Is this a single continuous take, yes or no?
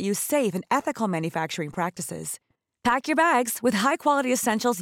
yes